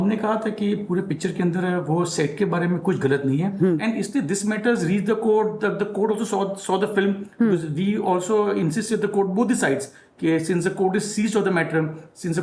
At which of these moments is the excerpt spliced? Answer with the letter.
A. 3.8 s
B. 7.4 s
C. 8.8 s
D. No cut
A